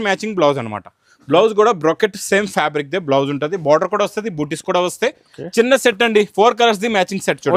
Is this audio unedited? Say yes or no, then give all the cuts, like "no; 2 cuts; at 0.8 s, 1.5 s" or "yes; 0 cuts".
yes; 0 cuts